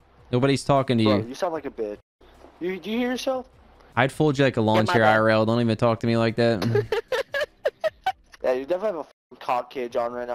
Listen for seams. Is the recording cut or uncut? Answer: cut